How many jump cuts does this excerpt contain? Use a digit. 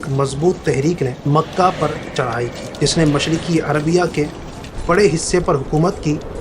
2